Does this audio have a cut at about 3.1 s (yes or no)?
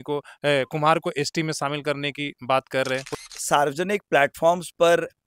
yes